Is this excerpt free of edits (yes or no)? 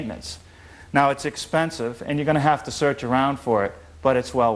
no